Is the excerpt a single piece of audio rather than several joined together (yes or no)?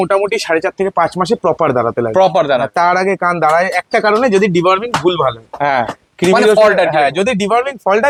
yes